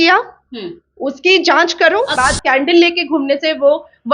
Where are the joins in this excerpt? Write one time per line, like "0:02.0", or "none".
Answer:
0:02.1